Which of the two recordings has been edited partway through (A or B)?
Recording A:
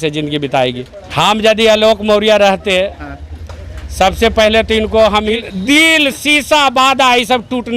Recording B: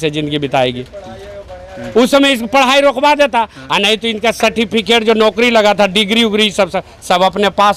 A